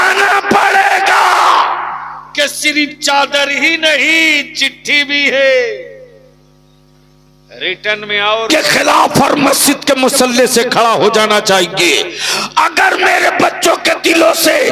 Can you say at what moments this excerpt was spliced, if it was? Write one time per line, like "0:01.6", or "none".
0:08.5